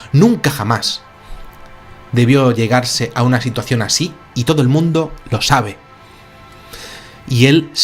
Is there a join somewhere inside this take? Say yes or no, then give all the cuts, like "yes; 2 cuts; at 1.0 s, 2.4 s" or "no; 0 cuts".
yes; 1 cut; at 1.0 s